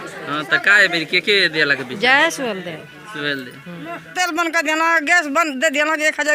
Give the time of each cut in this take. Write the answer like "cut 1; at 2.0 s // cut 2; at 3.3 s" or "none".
cut 1; at 4.1 s